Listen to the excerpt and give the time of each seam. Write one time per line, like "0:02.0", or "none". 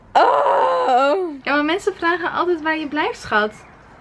0:01.4